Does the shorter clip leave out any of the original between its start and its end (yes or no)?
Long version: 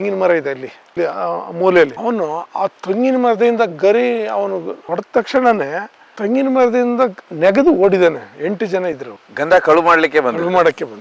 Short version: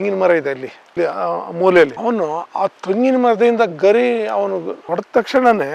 no